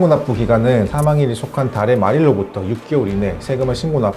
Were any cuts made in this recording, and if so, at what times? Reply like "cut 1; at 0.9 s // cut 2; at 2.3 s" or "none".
cut 1; at 0.9 s